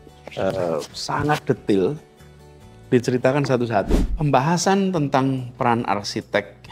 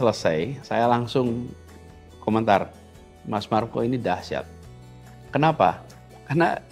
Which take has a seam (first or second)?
first